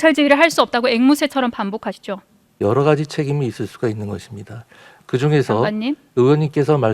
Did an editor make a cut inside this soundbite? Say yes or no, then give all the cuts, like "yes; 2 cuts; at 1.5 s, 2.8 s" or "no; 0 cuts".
yes; 1 cut; at 2.4 s